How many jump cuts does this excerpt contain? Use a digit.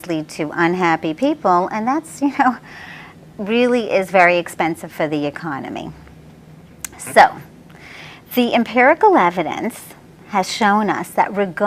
1